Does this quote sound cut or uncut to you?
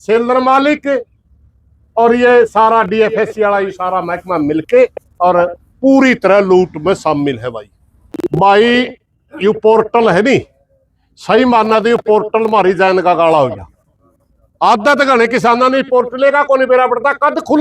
cut